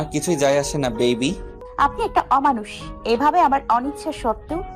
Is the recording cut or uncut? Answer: cut